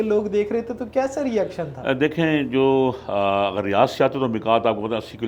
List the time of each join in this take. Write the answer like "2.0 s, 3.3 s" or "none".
none